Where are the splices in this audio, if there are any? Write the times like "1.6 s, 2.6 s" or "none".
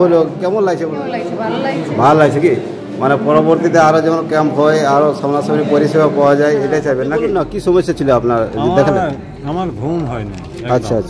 0.9 s, 7.3 s